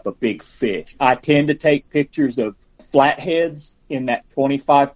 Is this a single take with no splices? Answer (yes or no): no